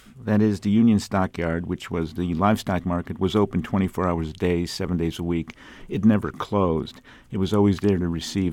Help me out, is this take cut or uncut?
uncut